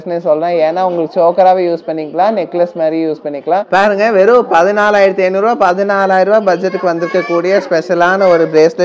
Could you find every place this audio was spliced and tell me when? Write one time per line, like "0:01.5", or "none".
0:03.3